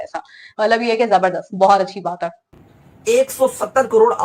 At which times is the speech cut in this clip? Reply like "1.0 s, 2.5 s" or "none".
2.3 s